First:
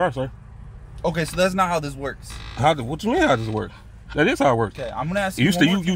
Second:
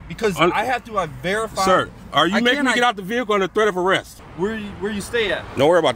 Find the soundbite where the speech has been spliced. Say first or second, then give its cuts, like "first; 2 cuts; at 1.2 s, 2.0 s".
second; 1 cut; at 4.2 s